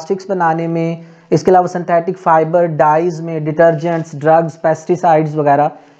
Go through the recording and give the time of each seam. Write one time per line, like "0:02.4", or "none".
none